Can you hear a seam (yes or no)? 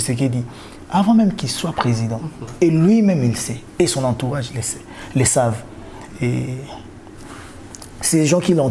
no